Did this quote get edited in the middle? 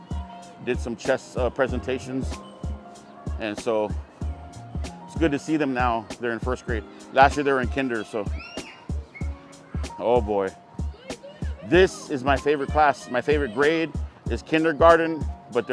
no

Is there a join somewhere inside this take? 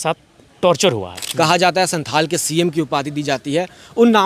yes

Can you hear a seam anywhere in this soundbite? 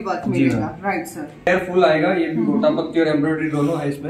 yes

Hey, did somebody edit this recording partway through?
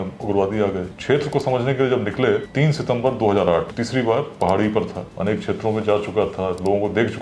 yes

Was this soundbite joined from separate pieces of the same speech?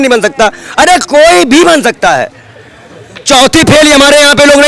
no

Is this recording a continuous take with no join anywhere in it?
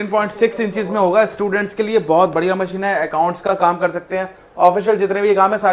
yes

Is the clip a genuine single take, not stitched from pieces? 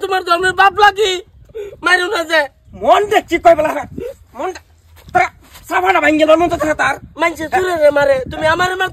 yes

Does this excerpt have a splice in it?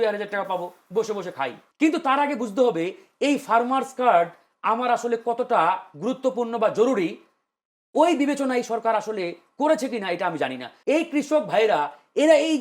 yes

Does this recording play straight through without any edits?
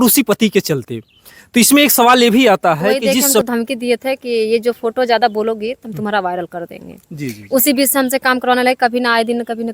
no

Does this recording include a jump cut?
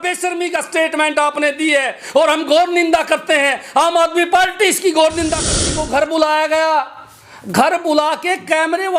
yes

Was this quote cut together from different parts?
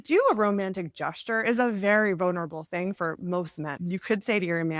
yes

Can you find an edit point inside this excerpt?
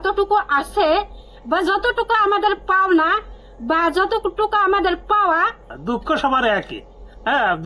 yes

